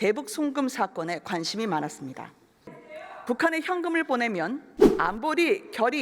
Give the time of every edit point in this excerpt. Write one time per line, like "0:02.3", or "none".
0:02.8